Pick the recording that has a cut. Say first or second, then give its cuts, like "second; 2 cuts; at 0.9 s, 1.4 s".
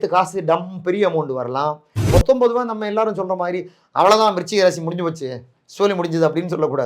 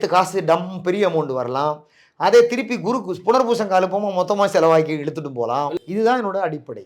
first; 1 cut; at 1.9 s